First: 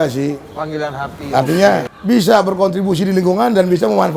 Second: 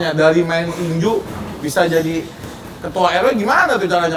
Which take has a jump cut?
first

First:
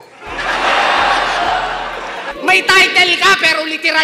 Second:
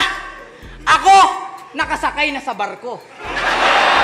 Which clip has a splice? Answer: first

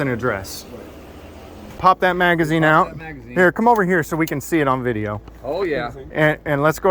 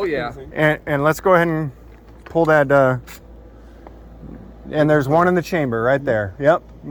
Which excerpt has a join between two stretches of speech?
first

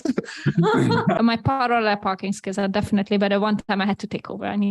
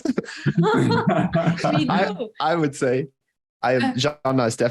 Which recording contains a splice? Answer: first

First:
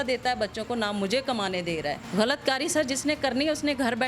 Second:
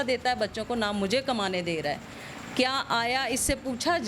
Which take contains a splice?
first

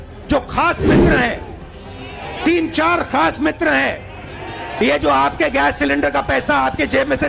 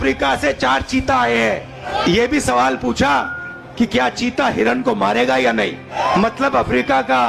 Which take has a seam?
second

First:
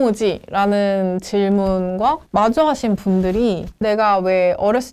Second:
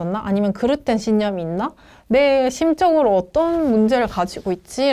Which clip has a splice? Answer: first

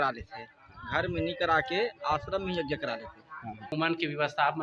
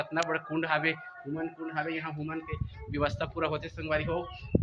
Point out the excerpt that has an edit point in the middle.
first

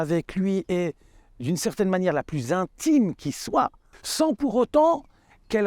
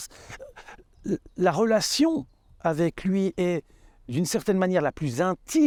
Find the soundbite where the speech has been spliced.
first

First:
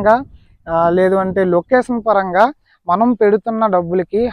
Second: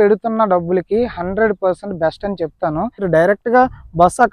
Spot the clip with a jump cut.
second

